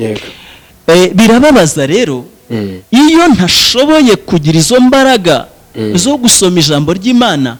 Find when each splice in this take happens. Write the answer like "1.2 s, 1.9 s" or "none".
none